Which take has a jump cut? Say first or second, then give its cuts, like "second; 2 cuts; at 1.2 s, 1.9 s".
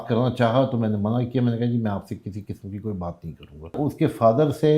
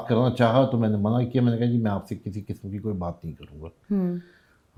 first; 1 cut; at 3.8 s